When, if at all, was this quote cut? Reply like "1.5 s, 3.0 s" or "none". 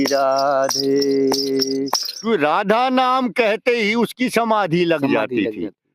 2.1 s